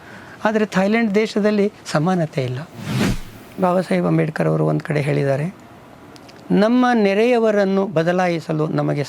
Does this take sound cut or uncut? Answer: cut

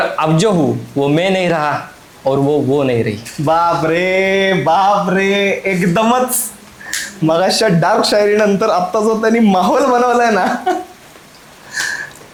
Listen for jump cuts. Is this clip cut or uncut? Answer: uncut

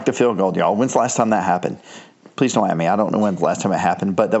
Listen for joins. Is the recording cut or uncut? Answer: uncut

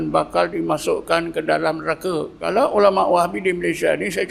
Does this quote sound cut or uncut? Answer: cut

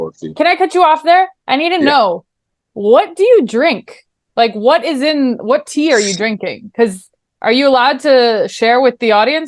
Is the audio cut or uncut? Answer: uncut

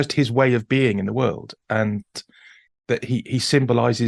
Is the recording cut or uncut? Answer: uncut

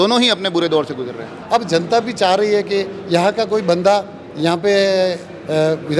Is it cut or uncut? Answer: cut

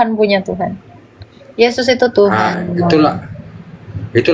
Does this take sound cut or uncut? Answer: uncut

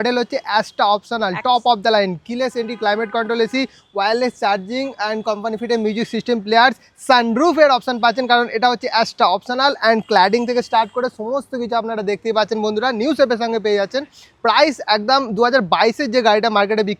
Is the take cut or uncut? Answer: uncut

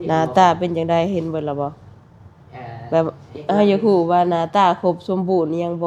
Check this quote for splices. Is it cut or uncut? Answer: uncut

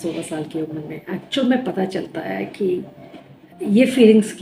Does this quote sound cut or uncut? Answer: uncut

